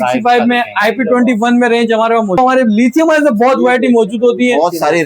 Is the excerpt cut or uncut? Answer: cut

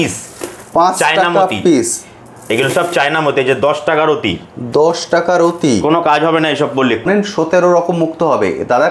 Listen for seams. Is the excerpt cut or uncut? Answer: cut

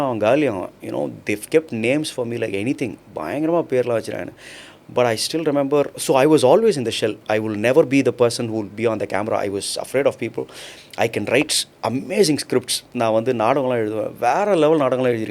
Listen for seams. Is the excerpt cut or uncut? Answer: uncut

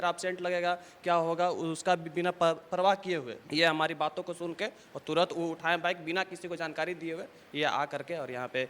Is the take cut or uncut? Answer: cut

